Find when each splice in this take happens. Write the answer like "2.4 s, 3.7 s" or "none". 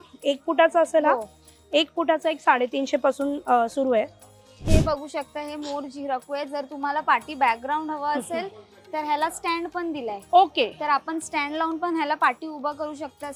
4.7 s